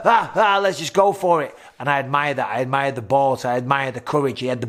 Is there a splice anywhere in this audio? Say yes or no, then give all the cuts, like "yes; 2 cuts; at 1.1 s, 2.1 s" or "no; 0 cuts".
no; 0 cuts